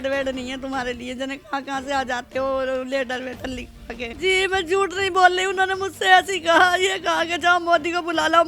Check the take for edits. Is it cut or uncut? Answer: cut